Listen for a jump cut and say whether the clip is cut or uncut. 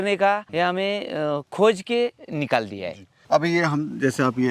uncut